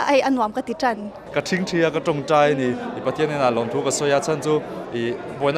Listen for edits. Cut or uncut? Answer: cut